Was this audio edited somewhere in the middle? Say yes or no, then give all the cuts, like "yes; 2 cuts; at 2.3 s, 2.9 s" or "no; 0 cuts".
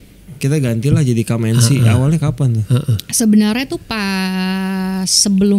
no; 0 cuts